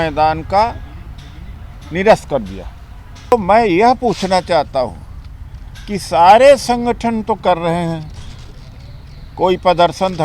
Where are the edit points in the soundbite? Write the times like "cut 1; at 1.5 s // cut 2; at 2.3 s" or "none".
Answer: cut 1; at 3.3 s